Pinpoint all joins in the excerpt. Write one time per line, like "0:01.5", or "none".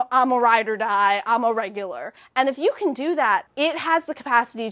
0:02.2
0:03.5